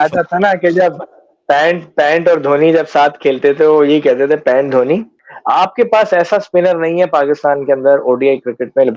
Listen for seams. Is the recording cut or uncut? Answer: cut